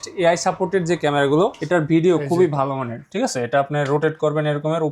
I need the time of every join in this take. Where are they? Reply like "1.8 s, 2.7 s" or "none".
1.6 s